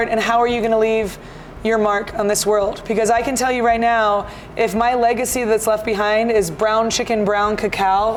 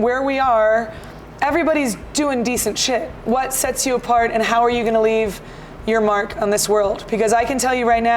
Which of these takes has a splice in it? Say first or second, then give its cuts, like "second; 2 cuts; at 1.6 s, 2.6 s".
second; 1 cut; at 3.1 s